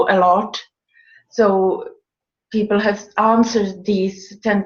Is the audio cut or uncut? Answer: uncut